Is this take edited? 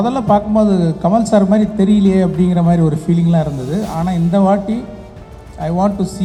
no; 0 cuts

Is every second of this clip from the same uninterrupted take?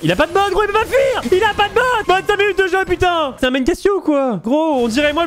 no; 3 cuts; at 1.2 s, 3.4 s, 4.4 s

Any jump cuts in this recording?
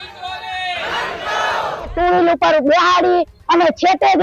yes; 1 cut; at 1.9 s

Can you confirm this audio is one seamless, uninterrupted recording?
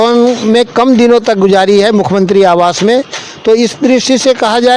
yes; 0 cuts

